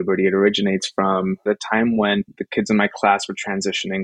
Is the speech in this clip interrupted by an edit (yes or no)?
yes